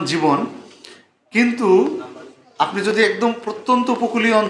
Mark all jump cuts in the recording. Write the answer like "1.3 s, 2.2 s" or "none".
none